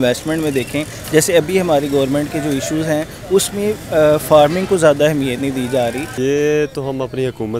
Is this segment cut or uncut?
cut